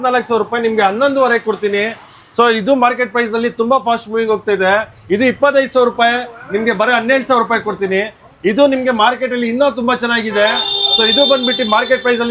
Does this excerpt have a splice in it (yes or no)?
no